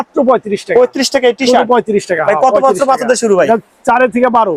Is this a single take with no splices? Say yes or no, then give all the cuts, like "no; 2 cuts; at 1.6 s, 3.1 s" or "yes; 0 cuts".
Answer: yes; 0 cuts